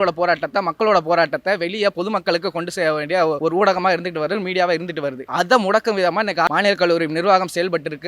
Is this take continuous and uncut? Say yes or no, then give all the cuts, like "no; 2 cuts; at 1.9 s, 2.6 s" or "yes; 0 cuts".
no; 3 cuts; at 3.4 s, 5.2 s, 6.5 s